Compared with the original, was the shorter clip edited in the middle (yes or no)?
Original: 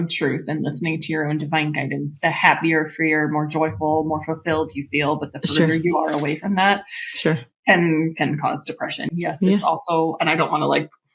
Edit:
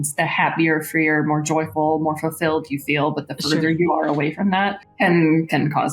yes